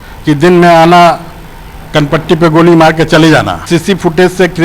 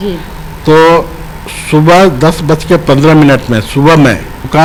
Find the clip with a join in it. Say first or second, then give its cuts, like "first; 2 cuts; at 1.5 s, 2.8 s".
first; 1 cut; at 3.6 s